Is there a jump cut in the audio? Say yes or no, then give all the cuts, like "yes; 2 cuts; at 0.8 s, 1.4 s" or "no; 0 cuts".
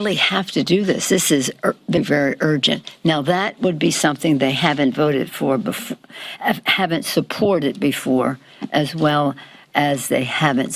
yes; 1 cut; at 2.0 s